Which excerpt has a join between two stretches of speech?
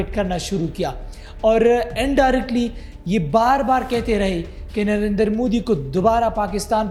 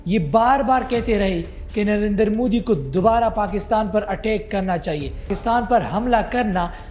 second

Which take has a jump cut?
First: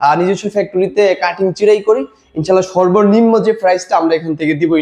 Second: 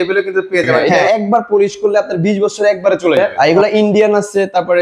second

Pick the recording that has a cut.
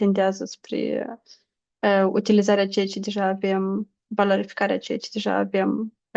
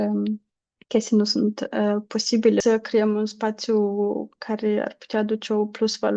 second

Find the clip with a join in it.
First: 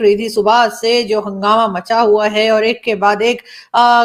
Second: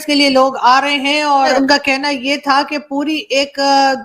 second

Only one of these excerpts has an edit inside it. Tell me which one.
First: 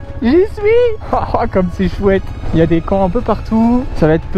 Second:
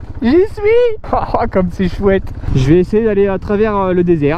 second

